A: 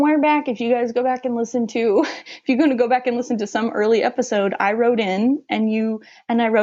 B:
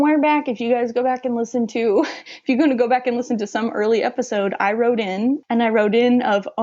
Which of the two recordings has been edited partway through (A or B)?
B